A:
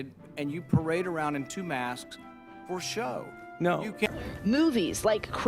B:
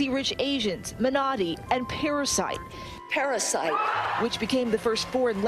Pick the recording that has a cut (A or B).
A